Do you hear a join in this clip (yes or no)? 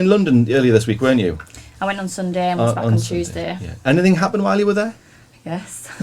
no